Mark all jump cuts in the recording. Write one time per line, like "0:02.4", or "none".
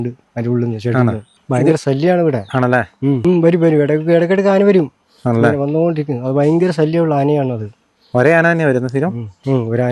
0:01.3
0:03.2